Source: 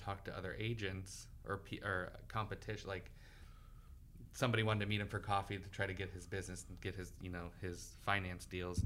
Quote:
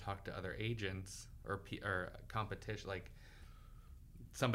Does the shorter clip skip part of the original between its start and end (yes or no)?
no